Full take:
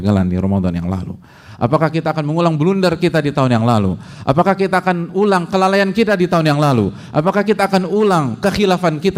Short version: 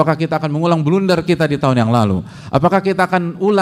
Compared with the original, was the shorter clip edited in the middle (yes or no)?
no